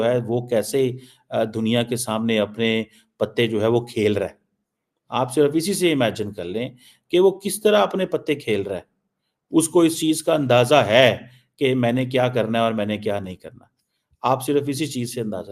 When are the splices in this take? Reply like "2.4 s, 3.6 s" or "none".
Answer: 14.5 s